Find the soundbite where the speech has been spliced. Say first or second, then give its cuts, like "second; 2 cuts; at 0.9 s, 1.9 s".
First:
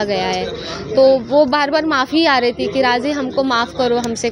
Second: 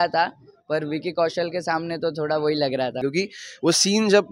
second; 1 cut; at 3.0 s